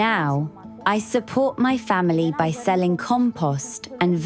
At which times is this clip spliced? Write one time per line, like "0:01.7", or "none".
none